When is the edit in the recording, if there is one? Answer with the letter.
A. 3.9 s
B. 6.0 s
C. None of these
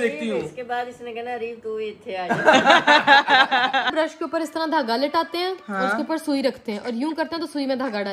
A